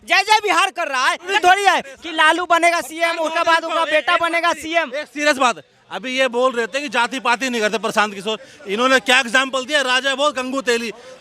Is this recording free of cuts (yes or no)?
no